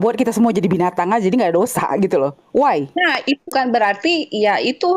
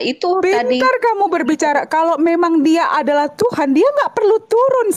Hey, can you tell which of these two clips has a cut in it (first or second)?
first